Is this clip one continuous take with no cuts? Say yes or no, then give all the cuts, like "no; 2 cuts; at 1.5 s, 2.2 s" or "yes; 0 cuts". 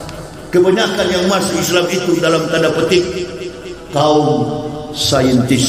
yes; 0 cuts